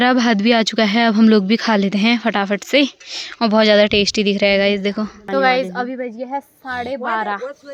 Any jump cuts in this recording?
no; 0 cuts

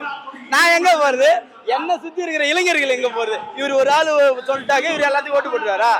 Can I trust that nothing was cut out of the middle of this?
yes; 0 cuts

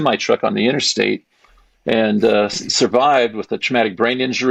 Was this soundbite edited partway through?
no; 0 cuts

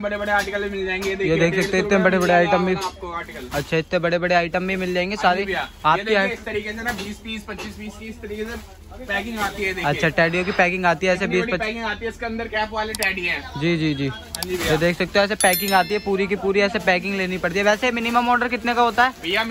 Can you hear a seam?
no; 0 cuts

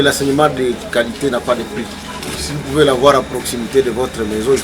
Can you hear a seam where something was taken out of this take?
yes; 1 cut; at 2.4 s

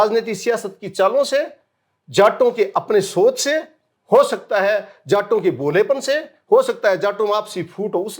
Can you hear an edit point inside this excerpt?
no; 0 cuts

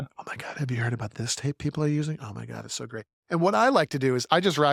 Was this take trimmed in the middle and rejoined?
no; 0 cuts

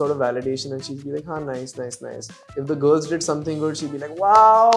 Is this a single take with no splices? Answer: yes; 0 cuts

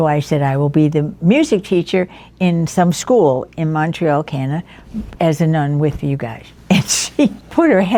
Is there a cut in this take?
no; 0 cuts

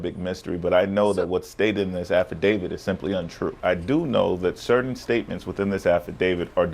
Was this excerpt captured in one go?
no; 1 cut; at 3.5 s

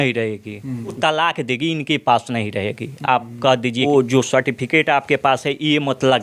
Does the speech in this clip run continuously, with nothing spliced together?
no; 2 cuts; at 1.0 s, 3.9 s

